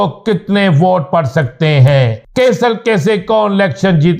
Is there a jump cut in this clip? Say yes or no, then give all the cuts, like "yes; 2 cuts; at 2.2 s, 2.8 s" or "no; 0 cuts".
yes; 1 cut; at 2.2 s